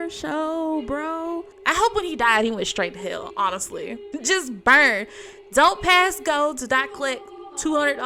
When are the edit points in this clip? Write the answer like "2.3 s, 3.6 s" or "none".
1.5 s, 4.0 s